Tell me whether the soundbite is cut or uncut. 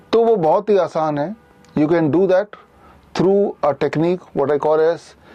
uncut